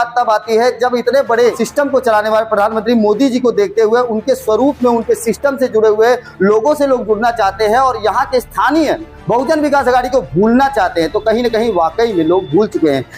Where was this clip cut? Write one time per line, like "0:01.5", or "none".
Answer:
0:01.6